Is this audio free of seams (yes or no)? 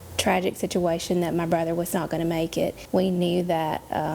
no